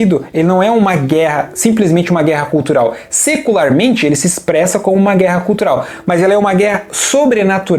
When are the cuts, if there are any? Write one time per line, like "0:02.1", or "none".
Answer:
none